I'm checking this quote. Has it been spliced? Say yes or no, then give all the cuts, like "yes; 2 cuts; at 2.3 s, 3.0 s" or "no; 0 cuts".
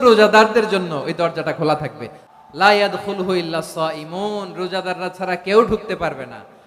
yes; 1 cut; at 2.2 s